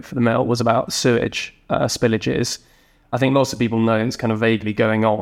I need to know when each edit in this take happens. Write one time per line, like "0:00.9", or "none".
none